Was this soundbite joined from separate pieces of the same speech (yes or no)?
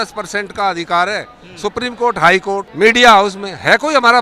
yes